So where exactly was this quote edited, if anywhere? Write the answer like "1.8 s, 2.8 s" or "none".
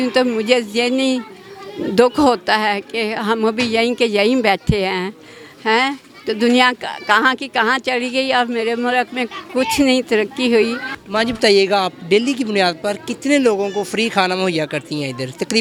none